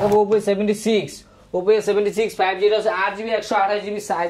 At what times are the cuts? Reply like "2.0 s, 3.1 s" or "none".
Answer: none